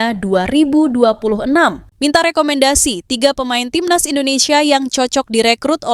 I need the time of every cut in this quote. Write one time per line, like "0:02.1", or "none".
0:01.9